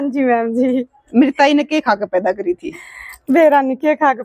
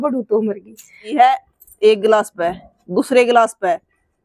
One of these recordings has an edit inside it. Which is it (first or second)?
second